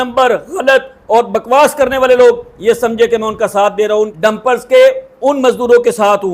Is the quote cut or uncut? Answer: cut